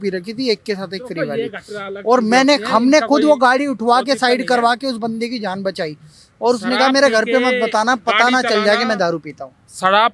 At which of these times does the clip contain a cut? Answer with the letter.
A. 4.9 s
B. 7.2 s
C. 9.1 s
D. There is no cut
D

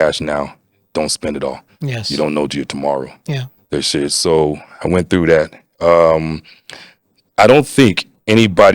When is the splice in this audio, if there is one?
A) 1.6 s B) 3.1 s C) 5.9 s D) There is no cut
D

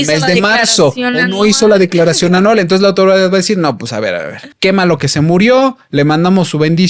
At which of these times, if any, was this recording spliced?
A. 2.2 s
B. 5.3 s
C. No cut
C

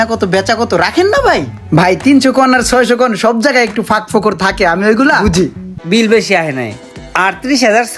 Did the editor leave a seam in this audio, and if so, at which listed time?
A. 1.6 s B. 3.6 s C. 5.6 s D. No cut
C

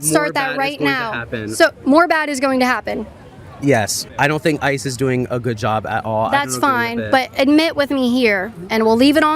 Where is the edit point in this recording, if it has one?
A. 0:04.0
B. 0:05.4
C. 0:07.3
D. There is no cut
A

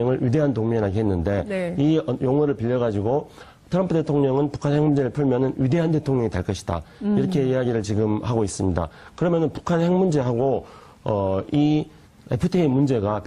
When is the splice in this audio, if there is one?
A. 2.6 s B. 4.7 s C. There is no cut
B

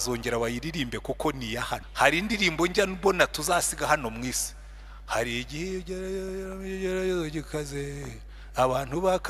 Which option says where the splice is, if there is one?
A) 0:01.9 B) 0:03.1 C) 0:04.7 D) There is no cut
A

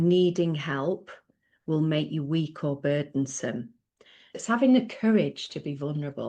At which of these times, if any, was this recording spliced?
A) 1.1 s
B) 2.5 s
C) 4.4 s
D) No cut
C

